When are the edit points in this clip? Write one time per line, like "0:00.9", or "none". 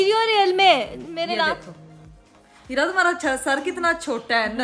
none